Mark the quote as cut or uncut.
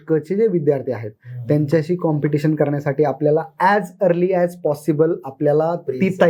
uncut